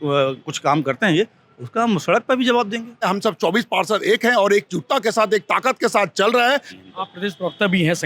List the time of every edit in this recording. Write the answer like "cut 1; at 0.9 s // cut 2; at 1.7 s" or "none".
cut 1; at 3.2 s // cut 2; at 6.7 s

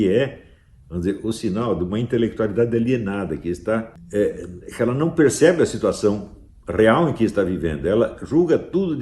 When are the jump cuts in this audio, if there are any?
cut 1; at 4.0 s

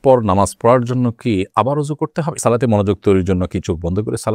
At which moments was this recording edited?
cut 1; at 2.4 s

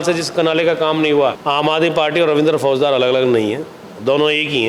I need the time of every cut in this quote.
cut 1; at 1.4 s

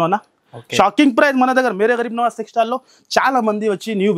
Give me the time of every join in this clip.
none

